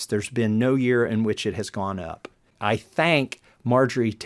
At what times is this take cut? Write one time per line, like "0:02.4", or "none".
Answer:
0:02.5